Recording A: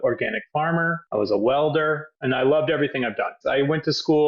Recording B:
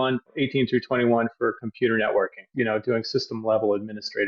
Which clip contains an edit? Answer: A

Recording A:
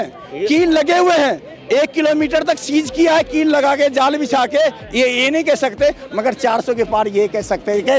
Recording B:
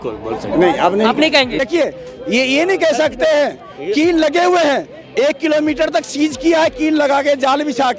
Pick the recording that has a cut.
B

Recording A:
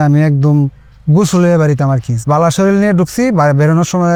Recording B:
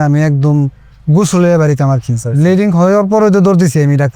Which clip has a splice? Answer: B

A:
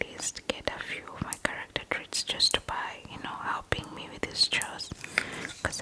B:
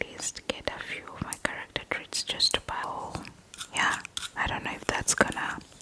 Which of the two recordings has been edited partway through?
B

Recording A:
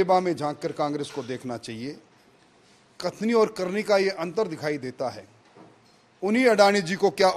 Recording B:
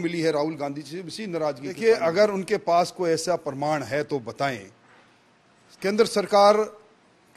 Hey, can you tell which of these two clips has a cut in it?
B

